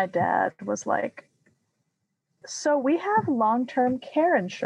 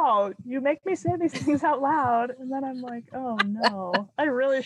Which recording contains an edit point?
first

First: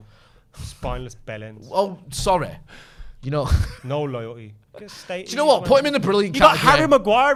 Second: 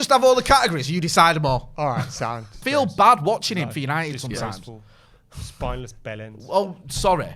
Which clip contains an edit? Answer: second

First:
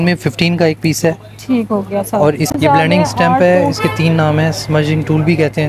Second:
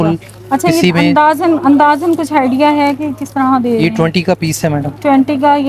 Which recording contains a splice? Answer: first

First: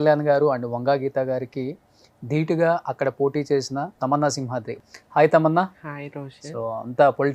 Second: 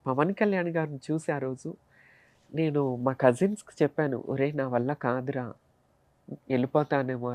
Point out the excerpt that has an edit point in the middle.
first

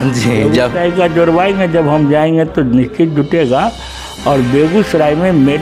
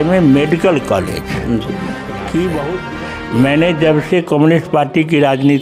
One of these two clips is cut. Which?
second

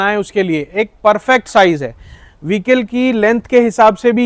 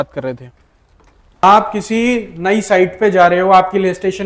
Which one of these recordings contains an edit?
second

